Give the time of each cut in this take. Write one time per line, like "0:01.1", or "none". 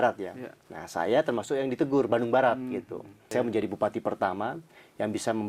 0:03.2